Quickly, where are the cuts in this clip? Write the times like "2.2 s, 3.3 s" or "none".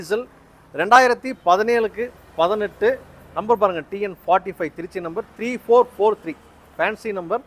none